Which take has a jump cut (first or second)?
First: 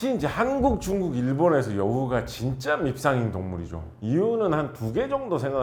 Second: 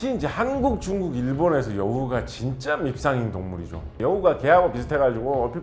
second